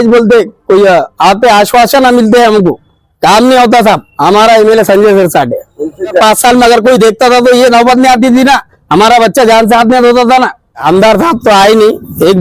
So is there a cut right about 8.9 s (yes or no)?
no